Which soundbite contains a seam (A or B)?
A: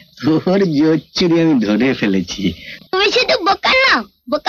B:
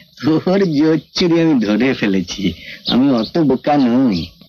A